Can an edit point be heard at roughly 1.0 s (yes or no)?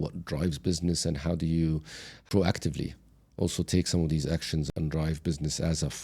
no